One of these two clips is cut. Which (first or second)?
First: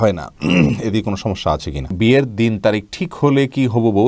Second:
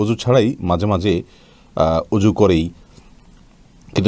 first